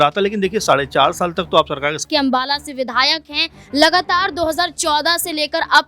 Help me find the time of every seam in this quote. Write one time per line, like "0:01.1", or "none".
0:02.0